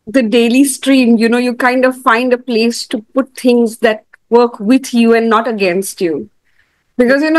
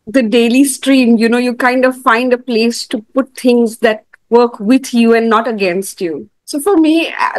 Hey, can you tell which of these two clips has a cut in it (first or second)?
second